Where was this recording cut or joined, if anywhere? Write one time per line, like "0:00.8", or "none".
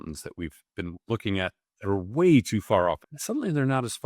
0:03.1